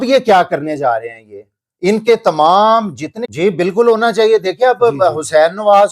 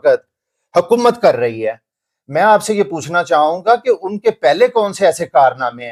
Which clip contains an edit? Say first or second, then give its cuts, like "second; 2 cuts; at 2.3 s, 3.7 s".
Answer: first; 1 cut; at 3.1 s